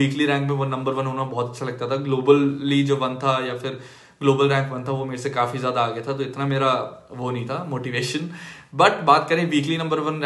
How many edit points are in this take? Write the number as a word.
zero